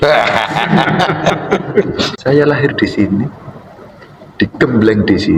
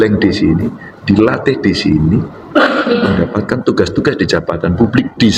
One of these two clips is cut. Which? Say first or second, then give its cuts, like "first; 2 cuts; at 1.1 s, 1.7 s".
first; 1 cut; at 2.1 s